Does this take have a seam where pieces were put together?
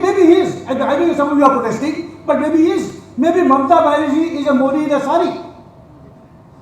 no; 0 cuts

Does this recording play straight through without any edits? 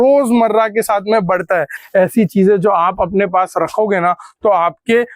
no; 1 cut; at 1.8 s

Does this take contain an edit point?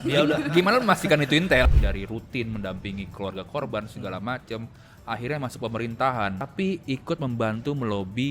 yes; 2 cuts; at 1.6 s, 6.5 s

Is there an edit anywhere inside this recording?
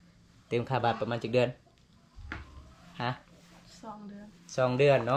no; 0 cuts

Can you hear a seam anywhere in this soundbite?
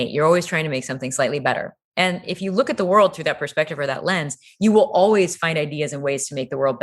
no; 0 cuts

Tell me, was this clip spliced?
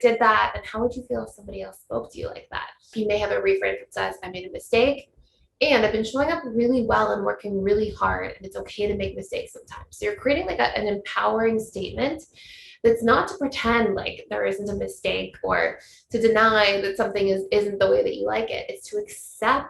yes; 1 cut; at 2.9 s

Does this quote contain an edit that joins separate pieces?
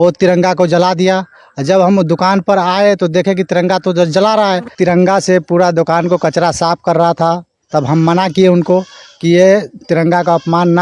yes; 1 cut; at 4.7 s

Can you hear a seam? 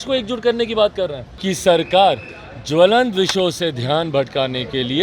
yes; 1 cut; at 1.3 s

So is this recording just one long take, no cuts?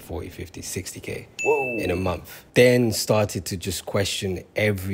yes; 0 cuts

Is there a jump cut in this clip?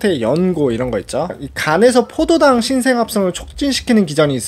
yes; 1 cut; at 1.3 s

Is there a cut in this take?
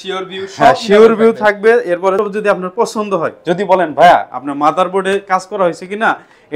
yes; 1 cut; at 2.2 s

